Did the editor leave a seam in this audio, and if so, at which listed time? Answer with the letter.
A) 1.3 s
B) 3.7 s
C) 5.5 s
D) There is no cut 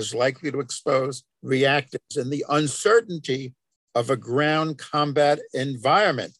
A